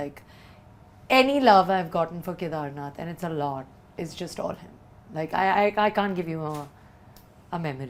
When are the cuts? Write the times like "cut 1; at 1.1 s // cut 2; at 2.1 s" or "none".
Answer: none